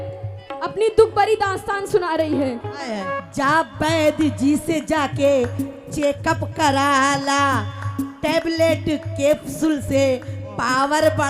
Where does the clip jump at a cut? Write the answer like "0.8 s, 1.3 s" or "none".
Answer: 3.2 s